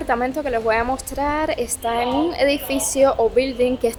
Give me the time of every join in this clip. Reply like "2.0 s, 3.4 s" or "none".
none